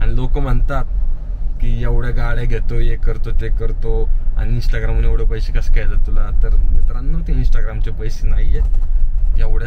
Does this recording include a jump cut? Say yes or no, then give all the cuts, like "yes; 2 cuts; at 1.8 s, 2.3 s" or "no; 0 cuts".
no; 0 cuts